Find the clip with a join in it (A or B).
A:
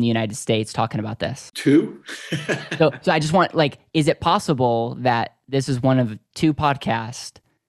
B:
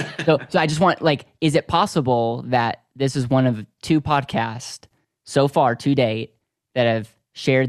A